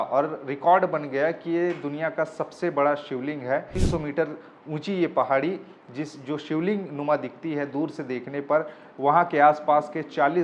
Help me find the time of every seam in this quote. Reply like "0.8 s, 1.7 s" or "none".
3.7 s

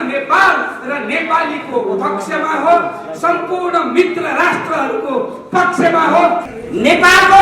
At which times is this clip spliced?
6.5 s

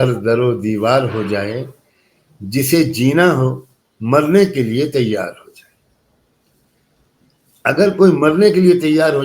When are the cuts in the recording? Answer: none

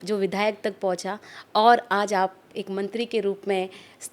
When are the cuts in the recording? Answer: none

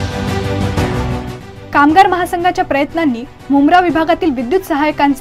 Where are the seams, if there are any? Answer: 1.4 s

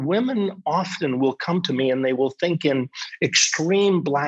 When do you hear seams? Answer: none

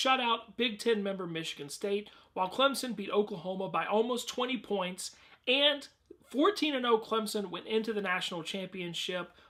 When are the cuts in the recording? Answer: none

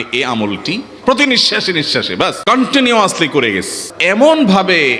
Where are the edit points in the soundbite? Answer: 0.9 s, 2.4 s, 3.9 s

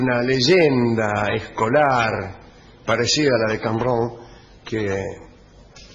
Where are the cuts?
1.8 s

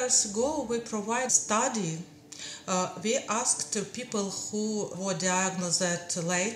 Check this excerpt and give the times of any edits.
1.3 s

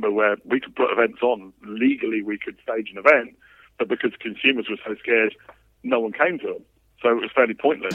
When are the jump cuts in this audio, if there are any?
none

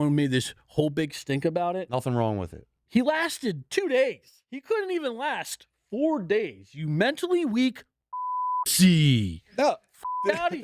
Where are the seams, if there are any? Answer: 2.7 s

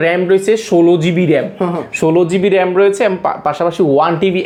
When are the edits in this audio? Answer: none

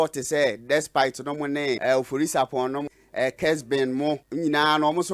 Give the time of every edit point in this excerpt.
1.8 s, 2.8 s, 4.3 s

